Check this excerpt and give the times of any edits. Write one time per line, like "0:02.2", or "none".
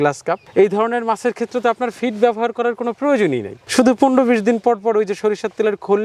none